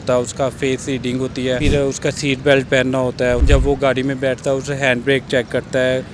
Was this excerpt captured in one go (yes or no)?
no